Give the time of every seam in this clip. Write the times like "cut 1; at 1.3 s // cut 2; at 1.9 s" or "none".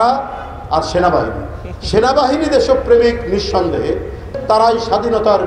cut 1; at 4.3 s